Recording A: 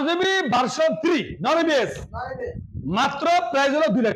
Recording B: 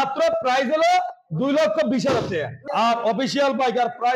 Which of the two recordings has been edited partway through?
B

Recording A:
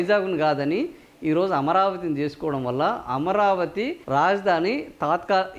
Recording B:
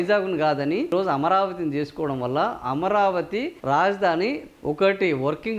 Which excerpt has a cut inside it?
B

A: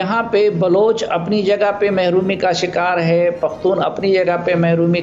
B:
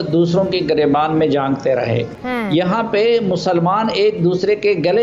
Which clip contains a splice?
B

